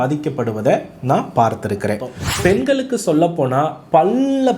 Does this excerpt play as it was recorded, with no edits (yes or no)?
no